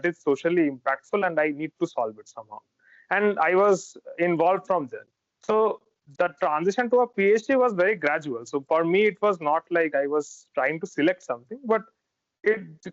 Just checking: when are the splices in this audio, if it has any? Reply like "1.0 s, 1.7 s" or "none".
none